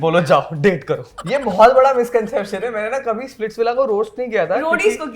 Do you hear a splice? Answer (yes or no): yes